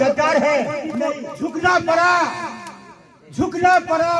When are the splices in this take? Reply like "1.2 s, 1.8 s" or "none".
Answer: 1.2 s